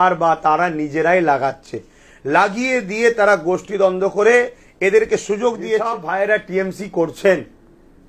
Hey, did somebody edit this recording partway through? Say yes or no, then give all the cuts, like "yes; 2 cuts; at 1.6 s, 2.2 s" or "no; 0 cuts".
yes; 1 cut; at 6.0 s